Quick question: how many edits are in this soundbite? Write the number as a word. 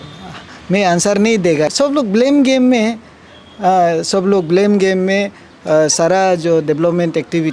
one